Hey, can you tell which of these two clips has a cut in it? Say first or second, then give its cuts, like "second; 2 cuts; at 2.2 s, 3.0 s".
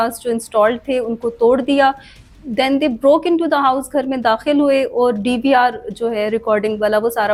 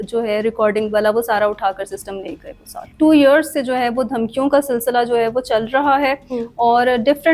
second; 1 cut; at 2.8 s